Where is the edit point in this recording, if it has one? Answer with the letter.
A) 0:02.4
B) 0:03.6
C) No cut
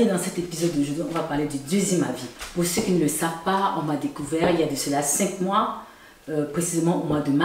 A